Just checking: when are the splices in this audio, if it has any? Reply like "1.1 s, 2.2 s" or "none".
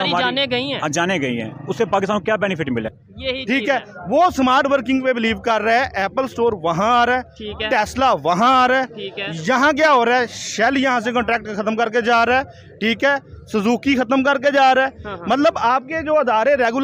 2.9 s